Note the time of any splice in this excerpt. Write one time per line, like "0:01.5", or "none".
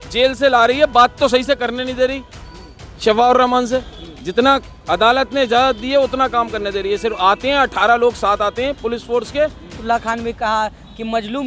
0:09.8